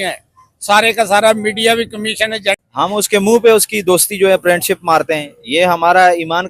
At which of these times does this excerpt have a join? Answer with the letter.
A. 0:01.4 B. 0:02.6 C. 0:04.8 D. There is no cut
B